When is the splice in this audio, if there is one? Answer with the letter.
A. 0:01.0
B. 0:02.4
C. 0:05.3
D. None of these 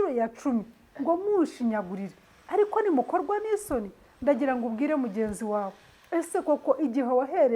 D